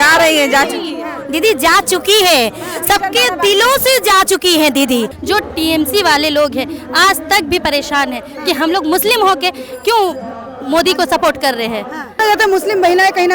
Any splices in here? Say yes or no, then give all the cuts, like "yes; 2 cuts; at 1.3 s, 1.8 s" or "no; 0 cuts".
yes; 2 cuts; at 5.2 s, 12.1 s